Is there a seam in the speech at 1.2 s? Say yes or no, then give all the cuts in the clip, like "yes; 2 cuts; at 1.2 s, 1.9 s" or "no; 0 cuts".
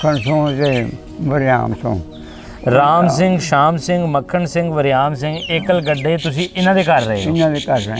no; 0 cuts